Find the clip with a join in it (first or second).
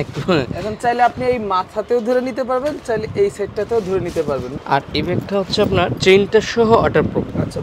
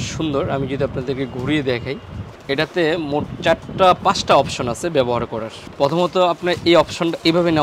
first